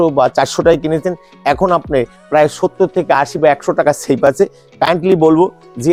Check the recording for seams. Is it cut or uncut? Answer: uncut